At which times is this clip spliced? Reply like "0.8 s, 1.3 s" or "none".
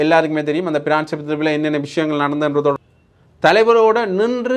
2.8 s